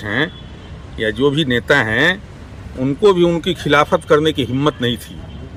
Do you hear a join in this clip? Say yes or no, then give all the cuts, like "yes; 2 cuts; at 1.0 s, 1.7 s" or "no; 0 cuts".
no; 0 cuts